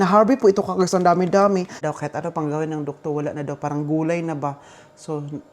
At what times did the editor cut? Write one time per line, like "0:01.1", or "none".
0:01.8

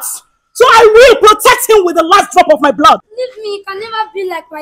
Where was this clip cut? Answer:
0:03.1

